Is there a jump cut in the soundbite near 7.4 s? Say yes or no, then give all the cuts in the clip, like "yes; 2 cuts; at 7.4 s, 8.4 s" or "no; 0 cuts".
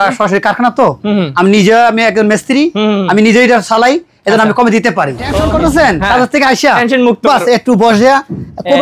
no; 1 cut; at 5.3 s